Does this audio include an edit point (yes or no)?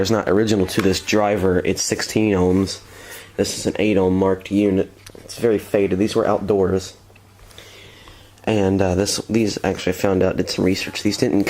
no